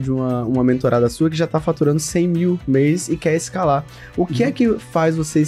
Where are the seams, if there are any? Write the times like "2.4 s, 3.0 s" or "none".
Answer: none